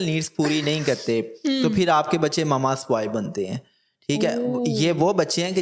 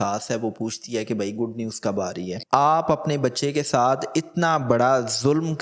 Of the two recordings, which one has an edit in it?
second; 1 cut; at 2.4 s

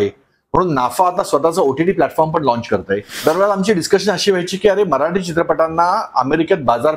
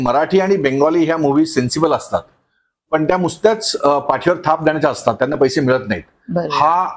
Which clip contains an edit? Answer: first; 1 cut; at 3.1 s

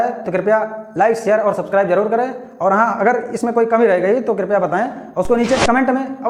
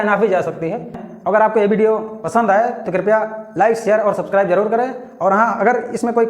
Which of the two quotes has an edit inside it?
second; 1 cut; at 1.1 s

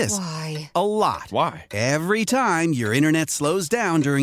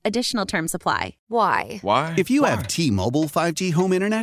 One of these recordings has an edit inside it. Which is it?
second; 1 cut; at 1.1 s

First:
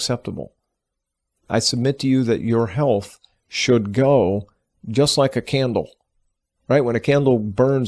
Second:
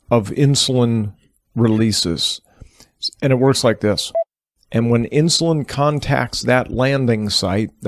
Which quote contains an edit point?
second; 1 cut; at 4.1 s

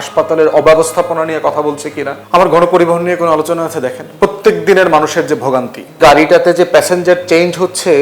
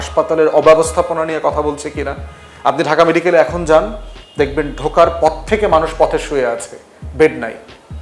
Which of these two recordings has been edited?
first; 2 cuts; at 2.1 s, 5.9 s

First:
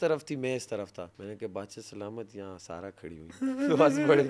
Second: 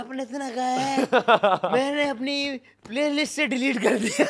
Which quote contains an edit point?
first; 1 cut; at 1.1 s

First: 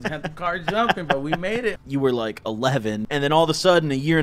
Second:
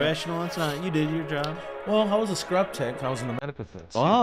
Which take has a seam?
first; 2 cuts; at 1.8 s, 3.0 s

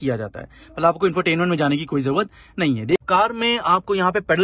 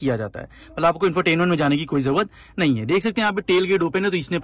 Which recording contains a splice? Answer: first; 1 cut; at 3.0 s

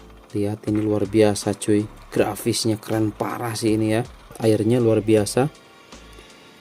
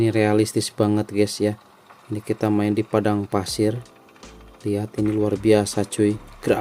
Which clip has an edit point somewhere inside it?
first; 1 cut; at 4.4 s

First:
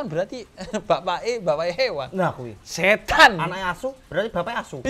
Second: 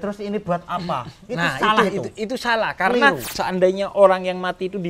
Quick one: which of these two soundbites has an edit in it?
second; 1 cut; at 3.3 s

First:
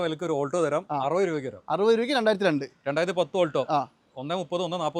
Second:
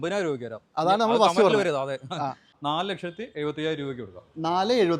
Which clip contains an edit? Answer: second; 1 cut; at 2.5 s

